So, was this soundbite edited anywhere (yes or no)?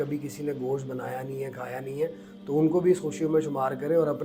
no